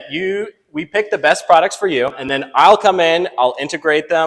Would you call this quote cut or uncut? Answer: cut